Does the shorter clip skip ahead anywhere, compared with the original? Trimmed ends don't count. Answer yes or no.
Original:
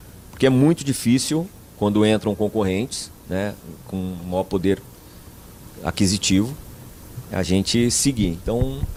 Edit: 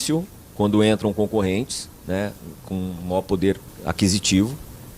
yes